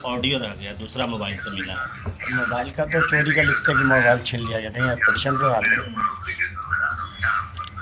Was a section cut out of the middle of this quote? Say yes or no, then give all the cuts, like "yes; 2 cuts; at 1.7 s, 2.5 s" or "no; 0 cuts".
no; 0 cuts